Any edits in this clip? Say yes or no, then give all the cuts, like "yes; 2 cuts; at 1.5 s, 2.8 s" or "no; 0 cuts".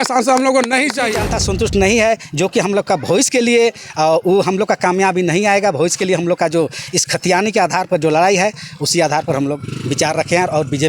yes; 1 cut; at 1.3 s